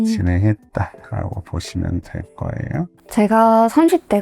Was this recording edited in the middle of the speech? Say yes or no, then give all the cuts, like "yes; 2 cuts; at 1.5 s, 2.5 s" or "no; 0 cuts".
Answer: yes; 1 cut; at 3.1 s